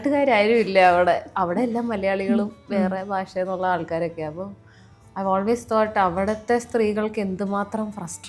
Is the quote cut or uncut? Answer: uncut